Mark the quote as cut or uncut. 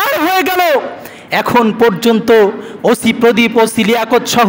uncut